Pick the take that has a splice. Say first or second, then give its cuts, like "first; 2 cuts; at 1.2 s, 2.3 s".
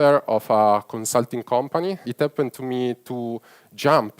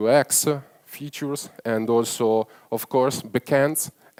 first; 1 cut; at 2.1 s